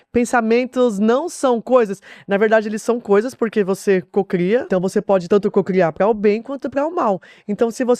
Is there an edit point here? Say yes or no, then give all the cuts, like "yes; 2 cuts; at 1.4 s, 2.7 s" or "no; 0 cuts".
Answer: yes; 1 cut; at 5.1 s